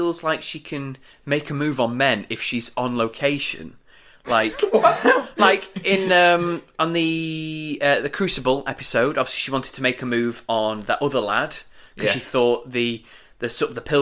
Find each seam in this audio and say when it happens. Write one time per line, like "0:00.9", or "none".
none